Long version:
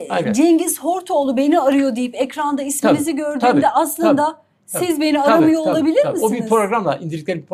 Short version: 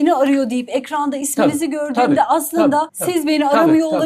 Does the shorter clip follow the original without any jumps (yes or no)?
no